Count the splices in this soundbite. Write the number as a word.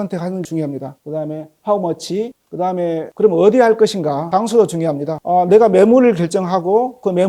zero